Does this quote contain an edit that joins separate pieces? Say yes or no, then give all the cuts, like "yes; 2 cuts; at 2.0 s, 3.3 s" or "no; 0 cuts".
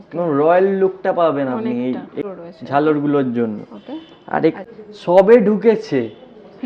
no; 0 cuts